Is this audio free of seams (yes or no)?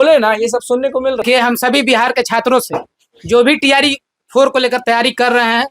no